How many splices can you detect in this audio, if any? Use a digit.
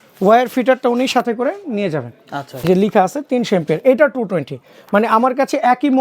1